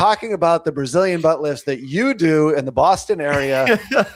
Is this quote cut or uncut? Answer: uncut